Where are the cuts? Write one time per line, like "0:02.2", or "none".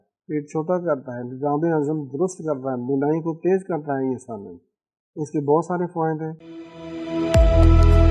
0:06.3